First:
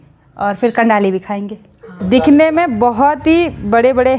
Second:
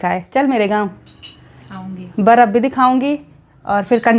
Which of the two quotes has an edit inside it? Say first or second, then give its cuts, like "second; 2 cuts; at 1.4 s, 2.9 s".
first; 1 cut; at 1.9 s